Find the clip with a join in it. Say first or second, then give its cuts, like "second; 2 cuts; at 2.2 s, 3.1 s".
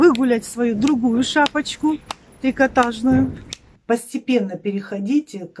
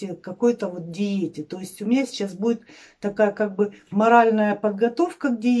first; 1 cut; at 3.7 s